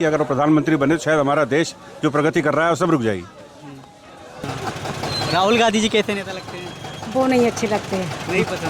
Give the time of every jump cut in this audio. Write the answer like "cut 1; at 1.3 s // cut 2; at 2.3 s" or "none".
cut 1; at 4.4 s